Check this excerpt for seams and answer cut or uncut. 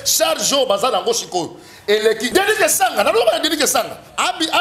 cut